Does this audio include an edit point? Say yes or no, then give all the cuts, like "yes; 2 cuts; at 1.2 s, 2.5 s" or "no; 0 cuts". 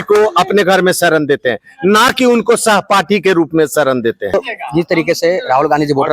yes; 1 cut; at 4.2 s